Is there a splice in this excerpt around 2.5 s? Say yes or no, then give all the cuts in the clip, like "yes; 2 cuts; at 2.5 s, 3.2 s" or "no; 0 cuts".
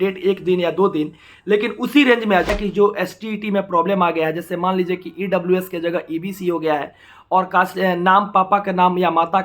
yes; 1 cut; at 2.5 s